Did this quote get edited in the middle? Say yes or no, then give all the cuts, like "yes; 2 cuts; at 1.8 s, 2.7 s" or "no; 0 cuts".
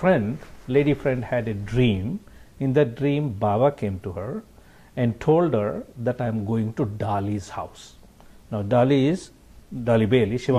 no; 0 cuts